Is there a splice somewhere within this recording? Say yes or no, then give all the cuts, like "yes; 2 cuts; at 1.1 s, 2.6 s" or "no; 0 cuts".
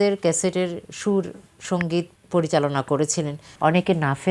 yes; 2 cuts; at 1.7 s, 3.4 s